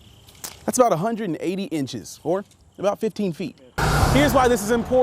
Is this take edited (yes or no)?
yes